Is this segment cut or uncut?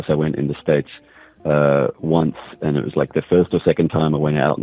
uncut